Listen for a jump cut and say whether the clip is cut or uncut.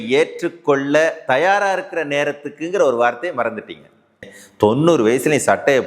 cut